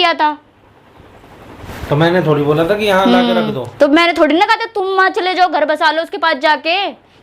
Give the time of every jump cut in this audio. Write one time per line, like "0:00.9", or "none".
none